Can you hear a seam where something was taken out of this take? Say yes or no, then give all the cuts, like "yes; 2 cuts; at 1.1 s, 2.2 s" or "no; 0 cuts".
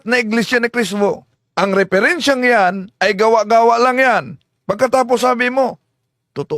yes; 1 cut; at 1.3 s